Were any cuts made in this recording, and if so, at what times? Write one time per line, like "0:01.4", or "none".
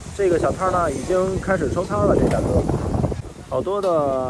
0:03.3